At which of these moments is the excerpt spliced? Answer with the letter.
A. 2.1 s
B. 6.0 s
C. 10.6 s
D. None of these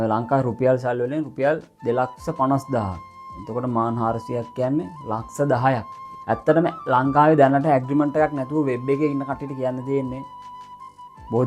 B